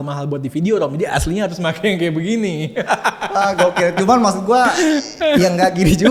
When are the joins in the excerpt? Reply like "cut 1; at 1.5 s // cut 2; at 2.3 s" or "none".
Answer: none